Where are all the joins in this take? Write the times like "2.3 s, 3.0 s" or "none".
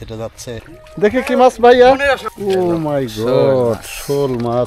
0.9 s, 2.3 s